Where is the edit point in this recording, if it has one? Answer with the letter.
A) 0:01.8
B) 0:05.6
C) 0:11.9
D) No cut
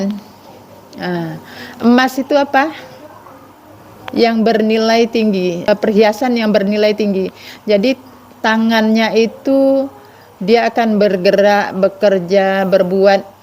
B